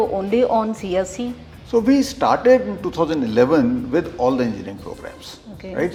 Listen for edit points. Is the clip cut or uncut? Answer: uncut